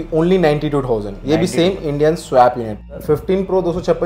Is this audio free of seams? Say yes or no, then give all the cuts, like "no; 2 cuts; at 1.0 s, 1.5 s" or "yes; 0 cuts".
no; 1 cut; at 2.9 s